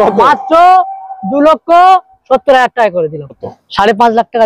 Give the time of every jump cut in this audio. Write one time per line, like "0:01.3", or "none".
0:03.5